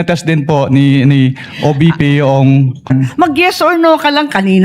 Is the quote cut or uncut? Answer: cut